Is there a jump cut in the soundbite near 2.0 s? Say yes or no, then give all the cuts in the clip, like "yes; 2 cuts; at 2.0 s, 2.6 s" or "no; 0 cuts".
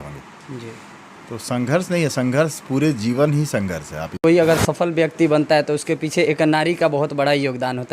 no; 1 cut; at 4.1 s